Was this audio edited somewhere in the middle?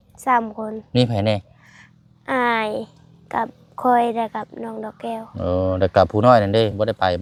no; 0 cuts

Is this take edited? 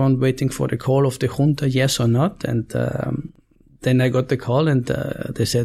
no; 0 cuts

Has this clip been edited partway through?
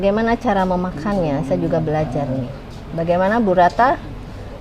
no; 0 cuts

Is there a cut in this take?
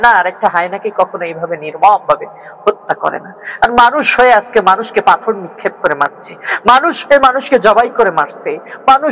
no; 0 cuts

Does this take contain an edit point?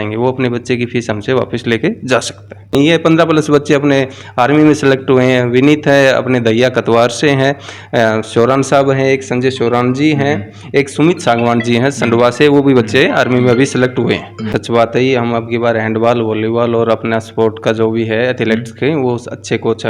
yes; 2 cuts; at 2.7 s, 14.5 s

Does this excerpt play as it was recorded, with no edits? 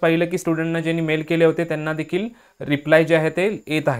yes; 0 cuts

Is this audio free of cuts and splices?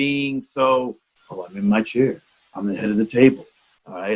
yes; 0 cuts

